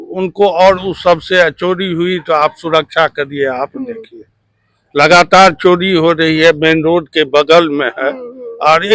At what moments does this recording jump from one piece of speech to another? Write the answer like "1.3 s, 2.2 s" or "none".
none